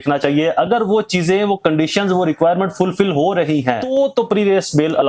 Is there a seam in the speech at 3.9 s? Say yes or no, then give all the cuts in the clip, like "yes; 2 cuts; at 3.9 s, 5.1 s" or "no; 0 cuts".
yes; 1 cut; at 3.9 s